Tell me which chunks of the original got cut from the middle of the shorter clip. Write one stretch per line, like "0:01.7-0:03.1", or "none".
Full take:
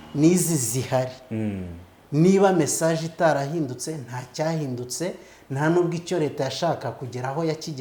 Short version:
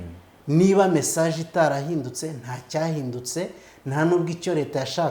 none